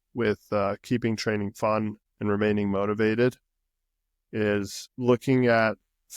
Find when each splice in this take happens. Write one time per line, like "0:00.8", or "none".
0:02.0
0:04.8